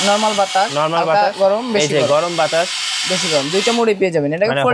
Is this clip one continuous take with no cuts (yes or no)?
yes